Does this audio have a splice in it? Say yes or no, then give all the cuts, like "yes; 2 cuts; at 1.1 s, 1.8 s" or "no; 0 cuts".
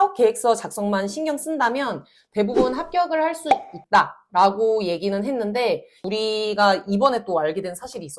yes; 1 cut; at 6.0 s